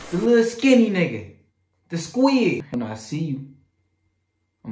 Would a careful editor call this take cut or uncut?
cut